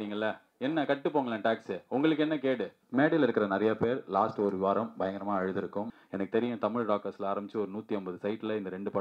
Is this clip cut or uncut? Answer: cut